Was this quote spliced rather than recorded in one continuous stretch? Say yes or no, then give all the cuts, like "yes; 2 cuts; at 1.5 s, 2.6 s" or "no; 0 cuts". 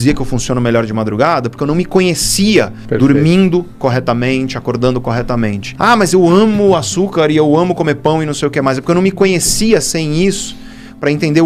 yes; 1 cut; at 5.7 s